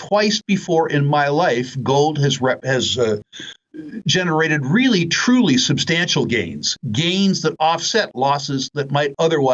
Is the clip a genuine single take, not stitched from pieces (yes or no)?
yes